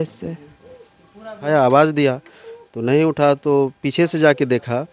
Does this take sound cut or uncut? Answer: cut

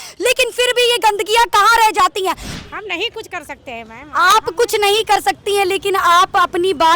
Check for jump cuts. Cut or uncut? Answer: cut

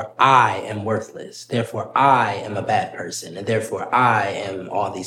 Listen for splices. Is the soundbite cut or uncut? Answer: uncut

